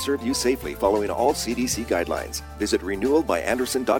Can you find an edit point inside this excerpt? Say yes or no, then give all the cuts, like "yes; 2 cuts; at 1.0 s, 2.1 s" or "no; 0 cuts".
no; 0 cuts